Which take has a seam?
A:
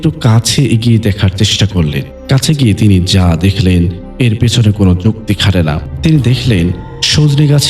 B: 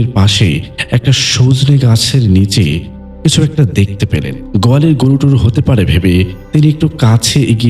A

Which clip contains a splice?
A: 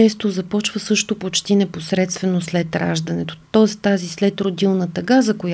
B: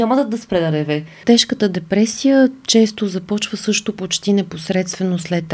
B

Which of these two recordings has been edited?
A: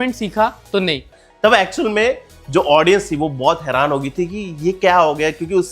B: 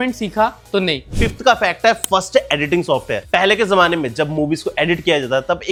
A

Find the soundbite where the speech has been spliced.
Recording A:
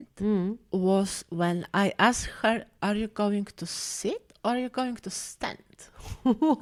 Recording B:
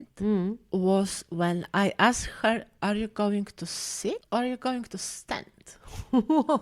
B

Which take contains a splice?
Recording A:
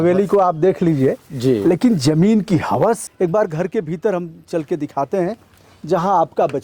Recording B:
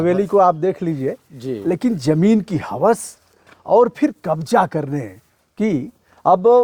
A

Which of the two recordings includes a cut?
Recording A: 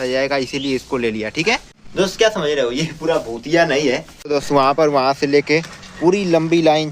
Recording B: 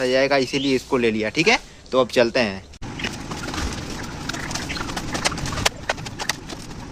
A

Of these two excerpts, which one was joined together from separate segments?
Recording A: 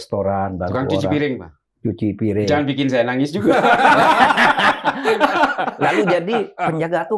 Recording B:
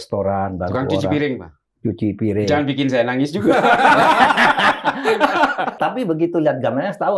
B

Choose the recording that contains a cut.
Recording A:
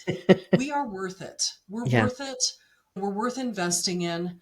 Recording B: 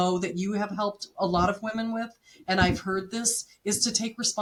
A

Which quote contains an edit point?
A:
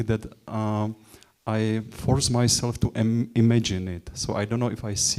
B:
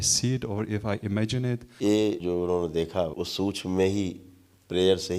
B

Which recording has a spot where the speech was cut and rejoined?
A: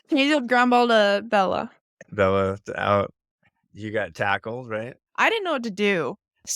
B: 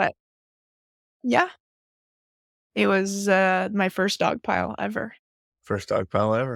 A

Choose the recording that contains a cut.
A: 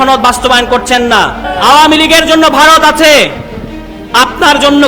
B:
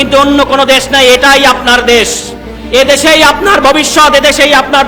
A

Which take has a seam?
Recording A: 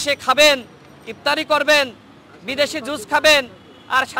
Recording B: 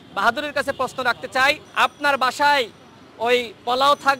B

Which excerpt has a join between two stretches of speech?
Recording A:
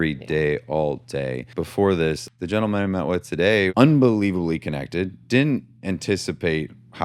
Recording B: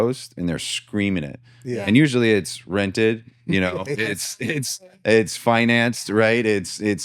A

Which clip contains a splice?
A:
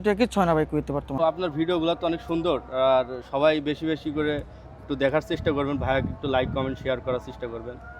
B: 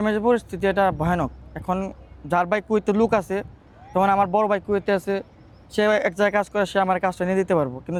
A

